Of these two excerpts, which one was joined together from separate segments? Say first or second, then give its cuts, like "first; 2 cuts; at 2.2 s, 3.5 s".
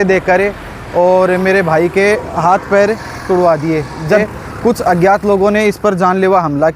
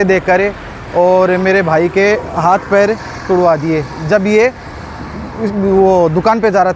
first; 1 cut; at 4.2 s